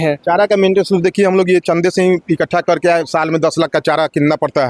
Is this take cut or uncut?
uncut